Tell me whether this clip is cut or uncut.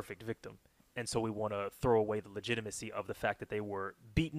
uncut